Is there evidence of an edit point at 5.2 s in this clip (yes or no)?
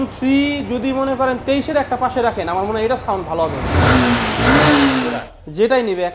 yes